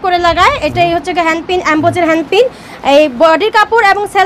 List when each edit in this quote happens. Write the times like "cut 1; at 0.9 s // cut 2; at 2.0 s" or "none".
none